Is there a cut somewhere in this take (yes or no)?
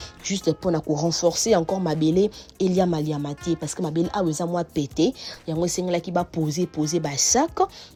no